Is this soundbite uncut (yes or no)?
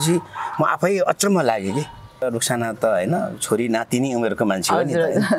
no